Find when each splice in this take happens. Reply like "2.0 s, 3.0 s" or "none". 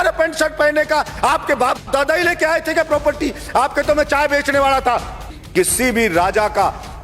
5.4 s